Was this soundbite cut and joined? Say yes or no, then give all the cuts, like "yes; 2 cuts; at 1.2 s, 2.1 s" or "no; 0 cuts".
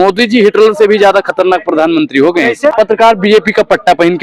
yes; 1 cut; at 2.7 s